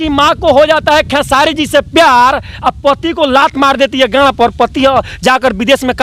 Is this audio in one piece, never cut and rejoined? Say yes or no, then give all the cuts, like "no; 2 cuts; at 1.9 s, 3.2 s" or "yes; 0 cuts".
yes; 0 cuts